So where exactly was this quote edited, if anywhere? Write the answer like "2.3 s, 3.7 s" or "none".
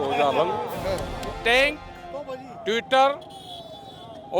1.3 s